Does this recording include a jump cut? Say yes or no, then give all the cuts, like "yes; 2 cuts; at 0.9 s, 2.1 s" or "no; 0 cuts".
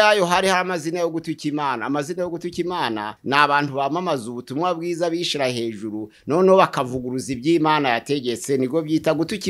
no; 0 cuts